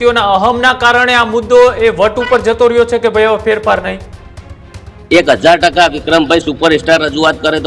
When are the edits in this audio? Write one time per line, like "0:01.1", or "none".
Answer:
none